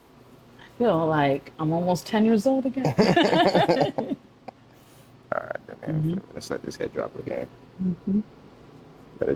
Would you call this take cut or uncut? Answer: uncut